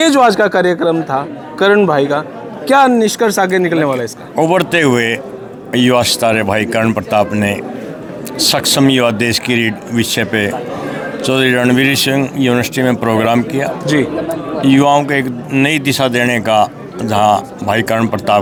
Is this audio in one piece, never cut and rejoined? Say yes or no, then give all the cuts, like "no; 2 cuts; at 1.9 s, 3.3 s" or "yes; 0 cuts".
yes; 0 cuts